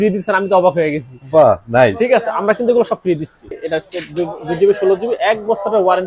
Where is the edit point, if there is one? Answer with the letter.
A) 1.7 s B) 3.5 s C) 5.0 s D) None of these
B